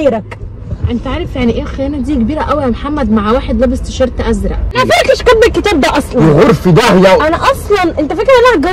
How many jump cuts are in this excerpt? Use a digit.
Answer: 1